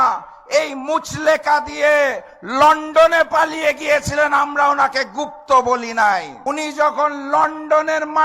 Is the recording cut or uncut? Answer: cut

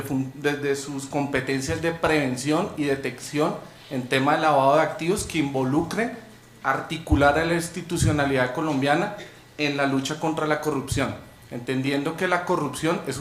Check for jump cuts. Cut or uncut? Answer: uncut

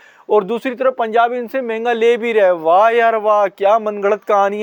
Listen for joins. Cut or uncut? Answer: uncut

